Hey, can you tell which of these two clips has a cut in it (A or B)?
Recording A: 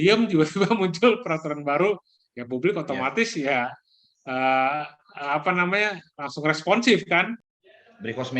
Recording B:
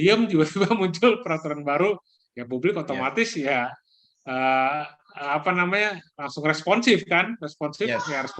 A